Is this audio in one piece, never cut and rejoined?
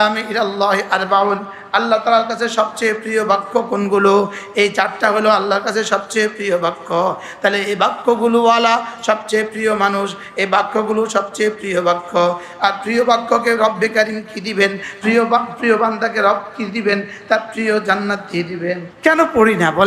no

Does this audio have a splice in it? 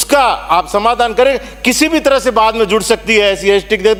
no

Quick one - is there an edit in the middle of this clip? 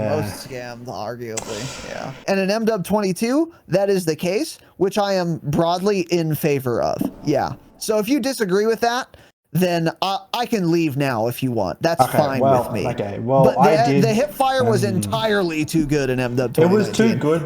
yes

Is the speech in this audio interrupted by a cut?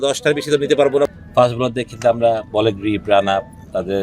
yes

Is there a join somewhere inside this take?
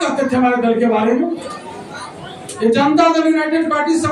no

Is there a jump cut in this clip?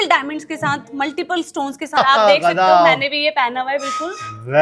yes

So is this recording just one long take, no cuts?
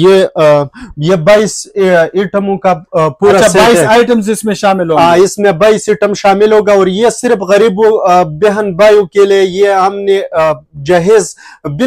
yes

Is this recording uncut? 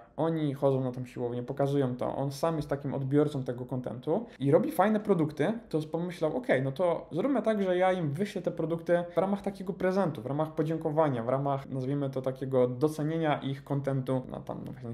yes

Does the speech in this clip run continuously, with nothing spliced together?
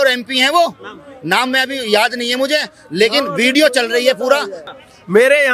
no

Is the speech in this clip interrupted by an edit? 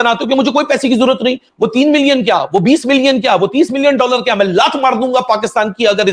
no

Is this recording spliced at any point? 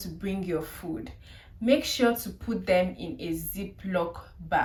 no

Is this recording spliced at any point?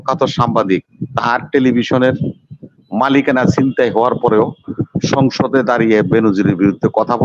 no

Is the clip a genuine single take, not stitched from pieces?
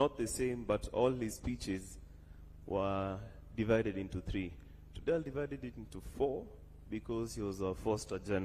yes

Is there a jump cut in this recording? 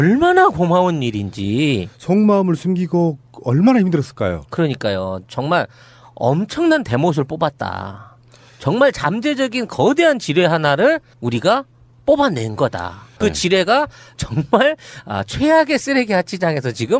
yes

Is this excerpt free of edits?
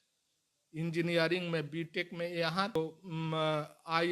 no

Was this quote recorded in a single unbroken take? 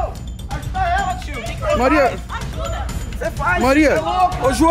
yes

